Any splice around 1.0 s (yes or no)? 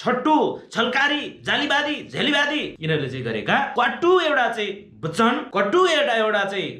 no